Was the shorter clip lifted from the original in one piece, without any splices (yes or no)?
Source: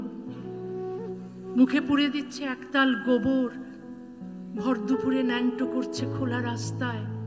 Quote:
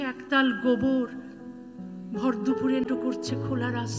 no